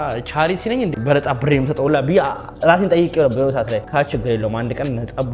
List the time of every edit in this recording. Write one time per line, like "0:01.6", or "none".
0:01.0
0:03.9